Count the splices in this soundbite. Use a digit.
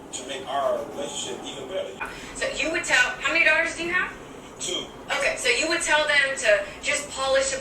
1